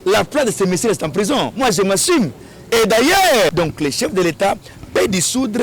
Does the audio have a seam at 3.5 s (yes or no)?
yes